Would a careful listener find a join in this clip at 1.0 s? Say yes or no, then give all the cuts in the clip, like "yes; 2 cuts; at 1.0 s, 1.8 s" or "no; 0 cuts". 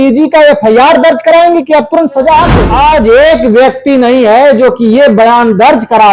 no; 1 cut; at 2.6 s